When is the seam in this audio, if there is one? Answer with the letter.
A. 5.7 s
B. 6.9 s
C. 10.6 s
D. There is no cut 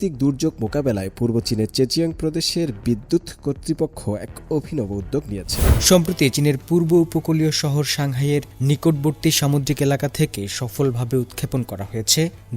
A